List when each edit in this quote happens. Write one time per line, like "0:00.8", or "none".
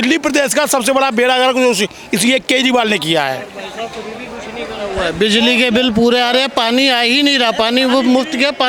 none